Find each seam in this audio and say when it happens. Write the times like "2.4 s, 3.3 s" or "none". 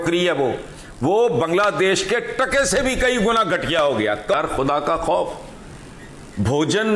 4.3 s